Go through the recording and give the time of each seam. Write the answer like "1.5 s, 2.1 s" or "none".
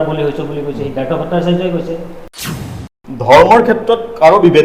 2.5 s